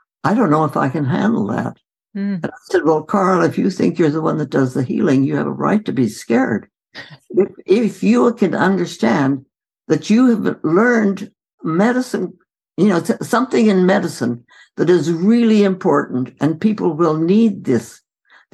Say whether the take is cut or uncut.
cut